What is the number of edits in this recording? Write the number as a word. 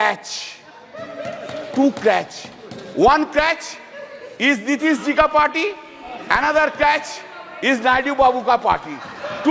zero